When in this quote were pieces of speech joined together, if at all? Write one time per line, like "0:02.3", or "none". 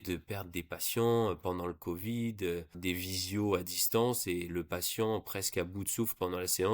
0:02.8